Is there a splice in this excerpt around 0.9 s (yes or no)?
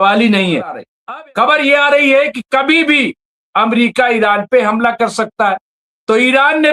yes